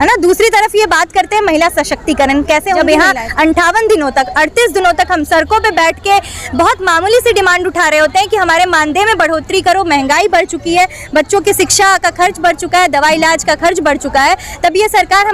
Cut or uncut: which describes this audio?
cut